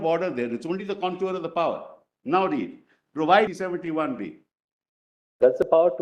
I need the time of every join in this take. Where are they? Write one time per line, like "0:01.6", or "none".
0:03.5